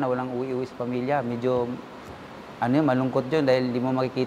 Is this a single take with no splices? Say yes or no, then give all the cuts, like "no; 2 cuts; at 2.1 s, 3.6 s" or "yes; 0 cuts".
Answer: yes; 0 cuts